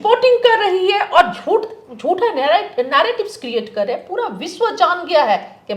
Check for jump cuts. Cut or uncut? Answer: uncut